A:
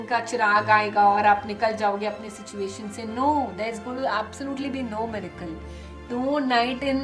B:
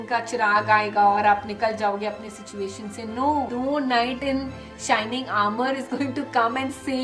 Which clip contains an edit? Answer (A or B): B